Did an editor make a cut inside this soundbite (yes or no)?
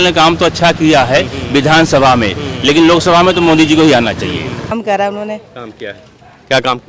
yes